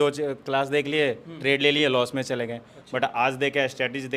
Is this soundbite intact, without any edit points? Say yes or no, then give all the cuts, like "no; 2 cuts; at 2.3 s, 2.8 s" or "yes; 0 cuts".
yes; 0 cuts